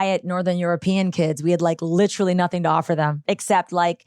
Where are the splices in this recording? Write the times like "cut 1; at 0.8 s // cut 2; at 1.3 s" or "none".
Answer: cut 1; at 3.2 s